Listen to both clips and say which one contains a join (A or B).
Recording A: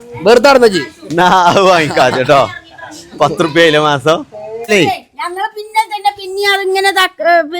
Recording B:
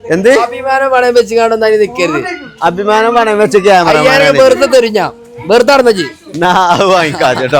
A